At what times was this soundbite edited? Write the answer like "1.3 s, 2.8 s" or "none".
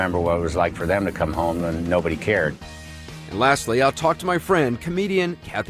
2.5 s